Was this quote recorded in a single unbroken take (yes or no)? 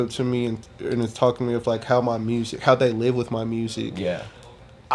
yes